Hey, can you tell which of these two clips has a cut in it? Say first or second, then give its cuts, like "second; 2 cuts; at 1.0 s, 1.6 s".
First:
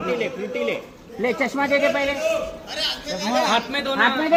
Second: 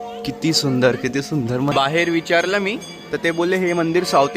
second; 1 cut; at 1.7 s